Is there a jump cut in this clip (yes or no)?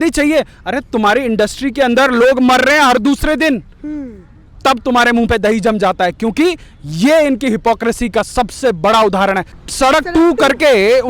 yes